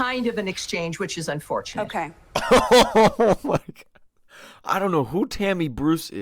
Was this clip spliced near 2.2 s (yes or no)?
yes